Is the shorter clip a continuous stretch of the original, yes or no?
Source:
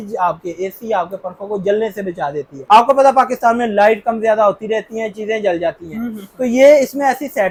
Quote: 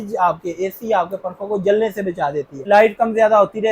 no